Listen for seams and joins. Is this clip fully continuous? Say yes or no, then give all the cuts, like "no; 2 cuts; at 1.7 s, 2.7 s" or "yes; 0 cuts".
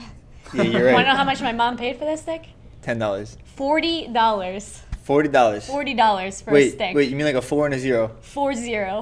yes; 0 cuts